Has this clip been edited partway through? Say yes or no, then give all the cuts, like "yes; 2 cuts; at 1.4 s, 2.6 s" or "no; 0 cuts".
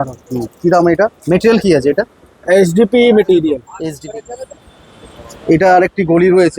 yes; 2 cuts; at 1.2 s, 3.7 s